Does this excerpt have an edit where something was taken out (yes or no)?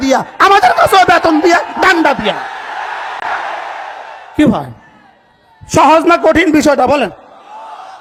no